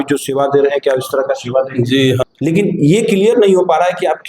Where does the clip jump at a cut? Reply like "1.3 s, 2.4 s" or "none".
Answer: 2.2 s